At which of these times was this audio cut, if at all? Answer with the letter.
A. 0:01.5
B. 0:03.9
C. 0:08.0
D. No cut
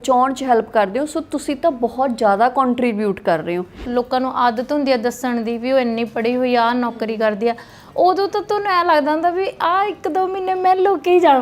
B